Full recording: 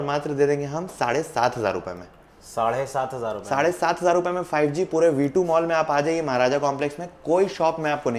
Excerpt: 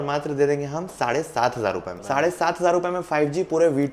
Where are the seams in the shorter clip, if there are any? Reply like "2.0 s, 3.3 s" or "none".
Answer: 2.0 s